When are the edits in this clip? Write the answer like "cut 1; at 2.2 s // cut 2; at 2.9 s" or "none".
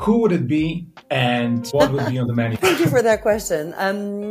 cut 1; at 1.7 s // cut 2; at 2.5 s

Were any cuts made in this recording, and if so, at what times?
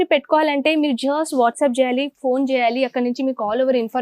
none

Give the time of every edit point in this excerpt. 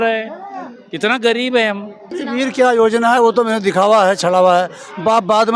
cut 1; at 2.2 s

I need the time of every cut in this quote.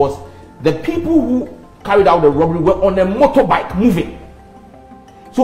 none

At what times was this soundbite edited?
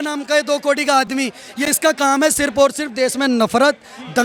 none

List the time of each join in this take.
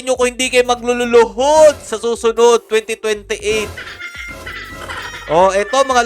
none

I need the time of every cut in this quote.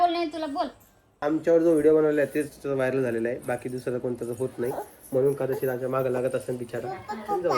cut 1; at 1.2 s

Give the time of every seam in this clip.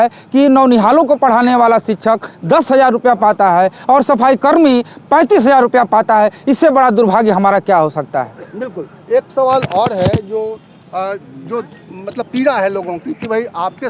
none

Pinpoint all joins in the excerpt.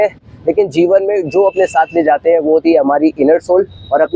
none

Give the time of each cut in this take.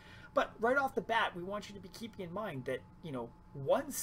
none

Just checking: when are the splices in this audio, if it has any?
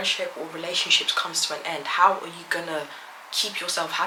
none

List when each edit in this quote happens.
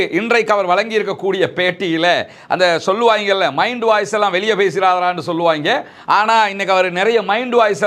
none

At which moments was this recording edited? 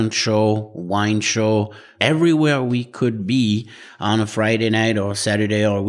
cut 1; at 1.8 s

